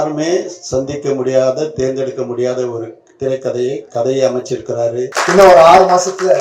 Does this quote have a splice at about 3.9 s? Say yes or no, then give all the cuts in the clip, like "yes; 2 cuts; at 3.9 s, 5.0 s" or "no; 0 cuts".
no; 1 cut; at 5.1 s